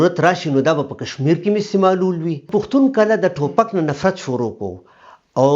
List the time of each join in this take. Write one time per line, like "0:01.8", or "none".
0:02.4